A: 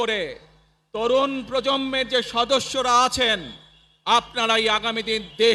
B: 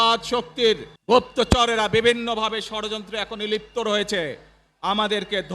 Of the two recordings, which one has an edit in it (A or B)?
B